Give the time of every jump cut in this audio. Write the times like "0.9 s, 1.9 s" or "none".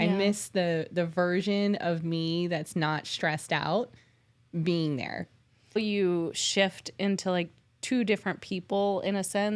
5.8 s